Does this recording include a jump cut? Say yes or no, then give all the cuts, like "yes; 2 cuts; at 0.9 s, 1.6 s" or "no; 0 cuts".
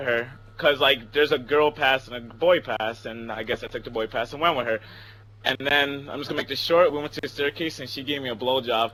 no; 0 cuts